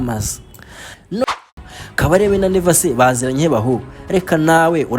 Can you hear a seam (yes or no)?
yes